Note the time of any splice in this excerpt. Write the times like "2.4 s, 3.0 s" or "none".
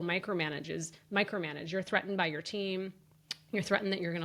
none